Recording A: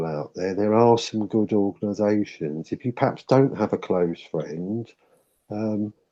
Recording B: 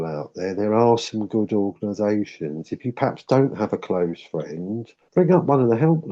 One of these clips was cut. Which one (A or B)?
B